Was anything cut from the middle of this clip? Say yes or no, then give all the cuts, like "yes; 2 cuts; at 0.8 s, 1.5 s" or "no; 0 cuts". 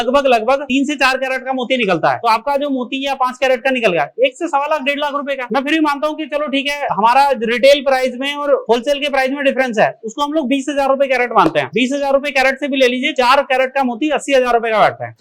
no; 0 cuts